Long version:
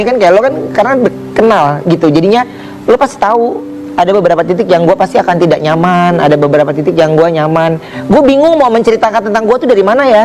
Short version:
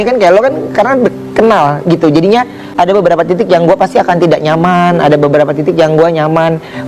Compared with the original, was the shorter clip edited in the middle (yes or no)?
yes